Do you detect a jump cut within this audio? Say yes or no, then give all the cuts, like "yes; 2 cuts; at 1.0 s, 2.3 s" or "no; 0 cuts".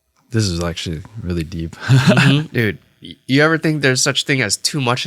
yes; 1 cut; at 2.5 s